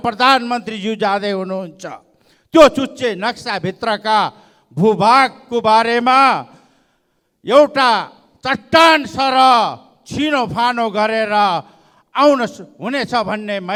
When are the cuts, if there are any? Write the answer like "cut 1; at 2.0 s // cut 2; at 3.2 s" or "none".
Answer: none